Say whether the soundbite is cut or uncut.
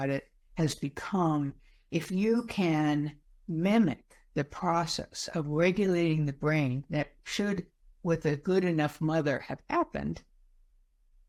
uncut